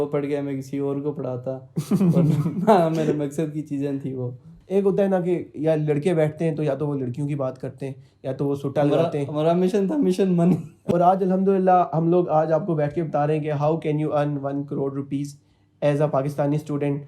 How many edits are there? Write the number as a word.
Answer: two